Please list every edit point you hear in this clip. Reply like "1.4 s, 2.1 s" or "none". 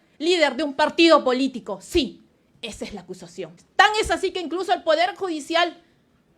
3.6 s

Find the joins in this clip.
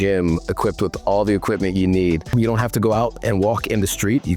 2.3 s

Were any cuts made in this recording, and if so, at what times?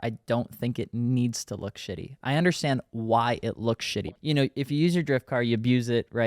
4.0 s

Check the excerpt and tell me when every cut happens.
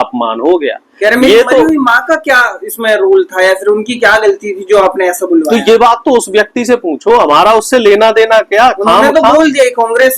none

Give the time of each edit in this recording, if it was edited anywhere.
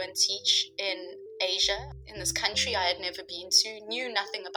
none

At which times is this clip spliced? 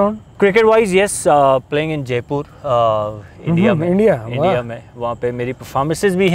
none

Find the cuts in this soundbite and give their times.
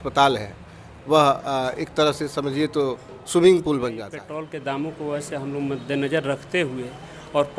4.2 s

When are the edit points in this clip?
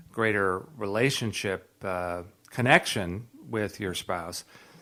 none

